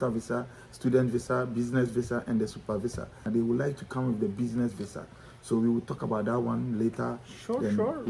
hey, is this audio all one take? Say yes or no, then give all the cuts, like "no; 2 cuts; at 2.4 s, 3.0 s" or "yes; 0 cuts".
no; 1 cut; at 3.3 s